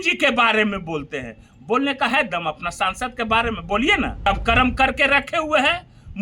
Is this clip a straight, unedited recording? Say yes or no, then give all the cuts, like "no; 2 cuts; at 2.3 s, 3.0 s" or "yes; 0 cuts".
no; 1 cut; at 4.2 s